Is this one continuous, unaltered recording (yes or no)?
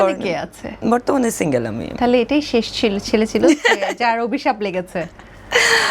yes